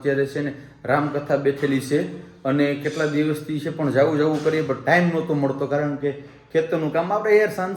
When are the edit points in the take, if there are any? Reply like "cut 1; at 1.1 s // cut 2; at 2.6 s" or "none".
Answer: none